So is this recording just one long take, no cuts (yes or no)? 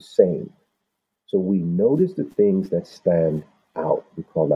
no